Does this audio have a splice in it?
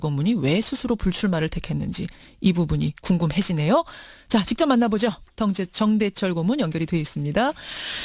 no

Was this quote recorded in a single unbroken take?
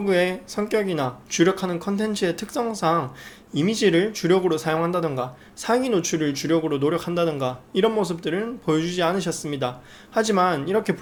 yes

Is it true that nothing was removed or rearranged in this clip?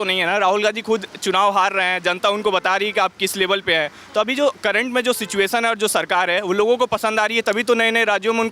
yes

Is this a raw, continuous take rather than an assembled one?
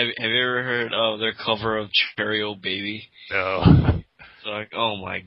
yes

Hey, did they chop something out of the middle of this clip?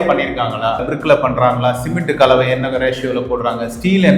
yes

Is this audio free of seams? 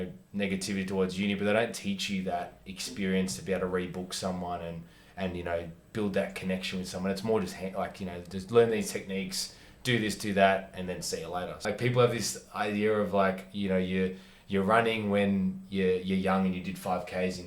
no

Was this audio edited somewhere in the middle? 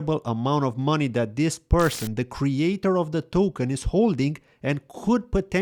no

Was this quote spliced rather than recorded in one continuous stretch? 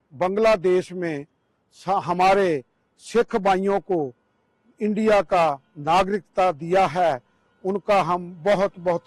no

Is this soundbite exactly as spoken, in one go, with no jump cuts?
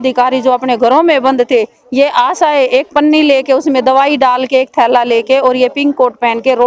yes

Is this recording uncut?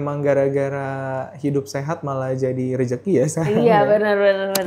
yes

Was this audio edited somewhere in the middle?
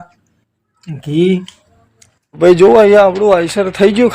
yes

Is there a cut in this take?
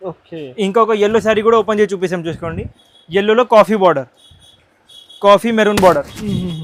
no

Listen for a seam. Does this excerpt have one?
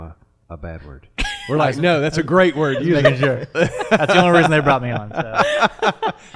no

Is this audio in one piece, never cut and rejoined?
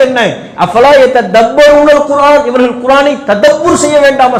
yes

